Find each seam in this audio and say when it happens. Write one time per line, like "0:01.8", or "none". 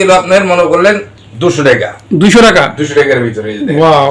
none